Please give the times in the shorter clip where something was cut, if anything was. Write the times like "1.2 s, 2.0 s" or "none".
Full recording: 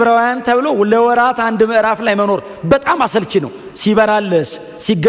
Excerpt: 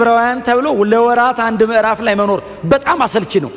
none